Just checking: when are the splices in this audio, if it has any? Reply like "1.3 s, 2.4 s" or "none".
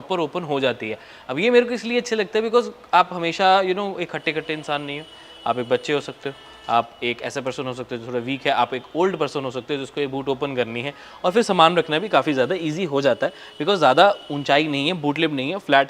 none